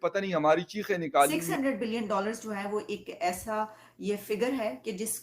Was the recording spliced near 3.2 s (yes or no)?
no